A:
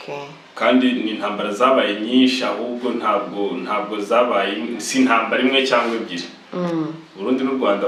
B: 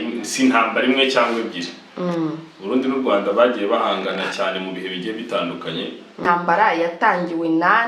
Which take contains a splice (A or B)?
B